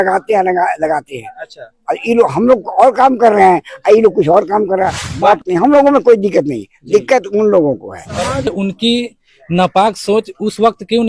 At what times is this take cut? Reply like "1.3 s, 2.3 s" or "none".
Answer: 5.4 s, 8.5 s